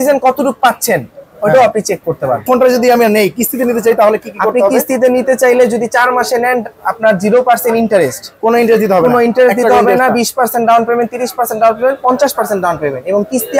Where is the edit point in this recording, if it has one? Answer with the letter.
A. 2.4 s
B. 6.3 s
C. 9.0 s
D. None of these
A